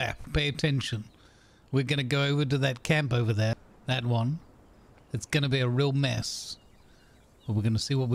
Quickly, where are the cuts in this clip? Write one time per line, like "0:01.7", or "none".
0:03.5